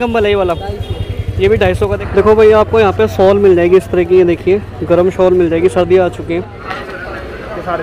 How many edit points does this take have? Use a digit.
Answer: 2